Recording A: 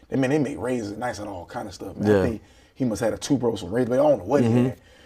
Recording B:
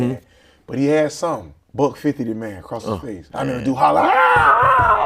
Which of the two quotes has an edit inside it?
B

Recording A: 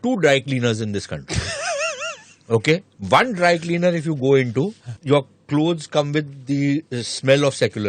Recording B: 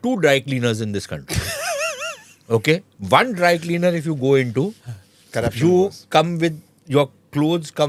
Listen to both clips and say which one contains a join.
A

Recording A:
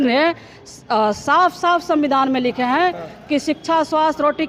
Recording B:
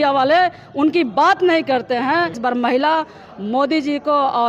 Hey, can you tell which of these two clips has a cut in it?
B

